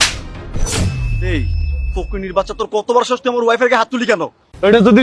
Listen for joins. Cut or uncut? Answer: cut